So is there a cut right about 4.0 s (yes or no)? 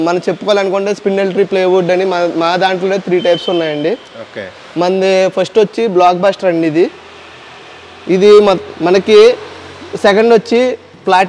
no